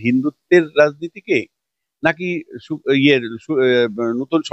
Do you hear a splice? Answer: no; 0 cuts

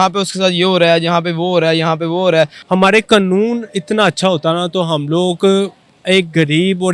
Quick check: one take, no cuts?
no; 1 cut; at 2.6 s

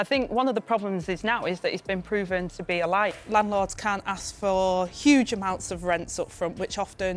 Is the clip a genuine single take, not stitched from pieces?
no; 1 cut; at 3.1 s

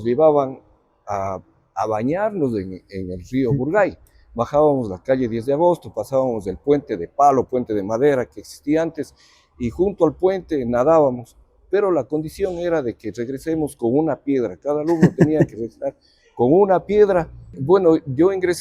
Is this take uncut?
no; 1 cut; at 17.5 s

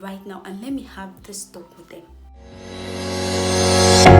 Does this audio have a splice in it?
yes; 1 cut; at 2.4 s

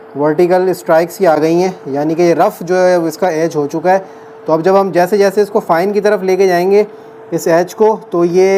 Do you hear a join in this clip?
no; 0 cuts

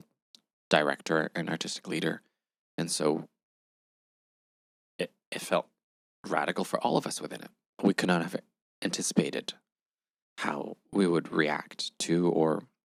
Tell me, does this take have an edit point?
no; 0 cuts

